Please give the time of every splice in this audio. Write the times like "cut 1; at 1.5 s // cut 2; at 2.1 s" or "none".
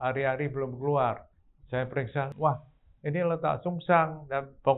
cut 1; at 2.3 s

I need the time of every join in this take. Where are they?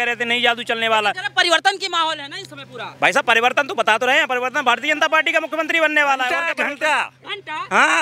cut 1; at 6.5 s

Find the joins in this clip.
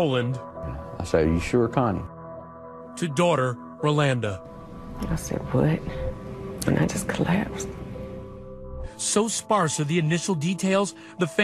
cut 1; at 4.2 s

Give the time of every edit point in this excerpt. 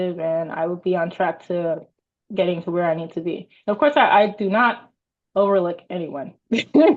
none

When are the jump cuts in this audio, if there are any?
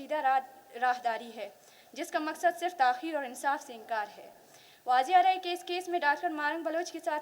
none

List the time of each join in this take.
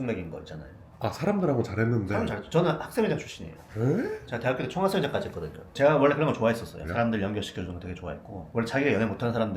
cut 1; at 5.7 s // cut 2; at 6.8 s

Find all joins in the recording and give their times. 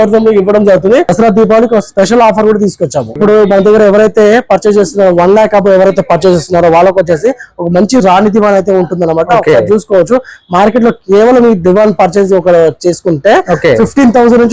cut 1; at 1.1 s // cut 2; at 3.2 s

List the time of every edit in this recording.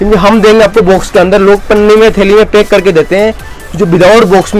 none

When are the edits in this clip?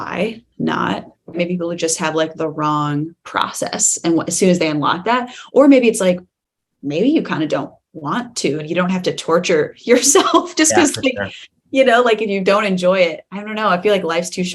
cut 1; at 1.4 s

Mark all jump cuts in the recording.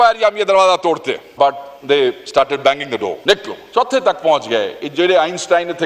cut 1; at 1.3 s // cut 2; at 3.2 s

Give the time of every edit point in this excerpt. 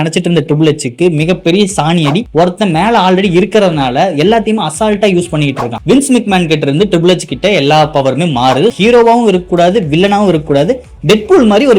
cut 1; at 2.3 s // cut 2; at 5.7 s // cut 3; at 8.8 s

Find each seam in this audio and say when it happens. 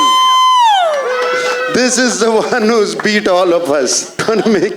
none

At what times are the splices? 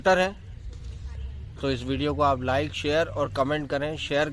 none

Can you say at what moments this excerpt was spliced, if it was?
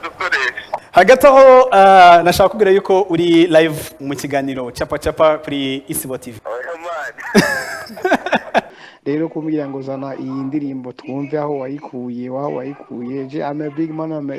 cut 1; at 0.8 s // cut 2; at 6.3 s // cut 3; at 8.7 s

